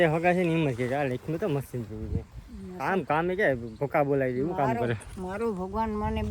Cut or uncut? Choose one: uncut